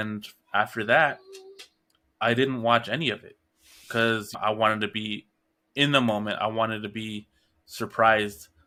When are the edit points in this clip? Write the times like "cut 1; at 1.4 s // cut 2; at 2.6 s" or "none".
none